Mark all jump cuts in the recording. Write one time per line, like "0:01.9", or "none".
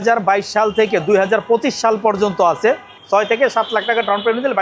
0:02.9